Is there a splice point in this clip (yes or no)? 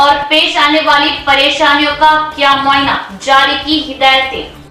no